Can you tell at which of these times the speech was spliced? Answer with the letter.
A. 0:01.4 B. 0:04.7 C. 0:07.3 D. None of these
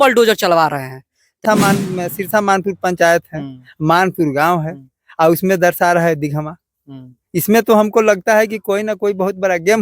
A